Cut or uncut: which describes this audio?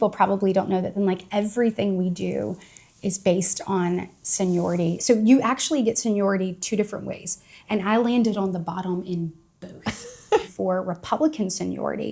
cut